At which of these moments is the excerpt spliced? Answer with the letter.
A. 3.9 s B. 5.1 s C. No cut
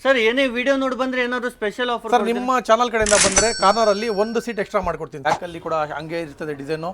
B